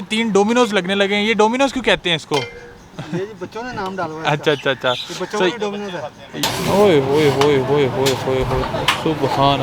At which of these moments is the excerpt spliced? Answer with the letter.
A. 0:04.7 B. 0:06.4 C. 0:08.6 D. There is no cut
B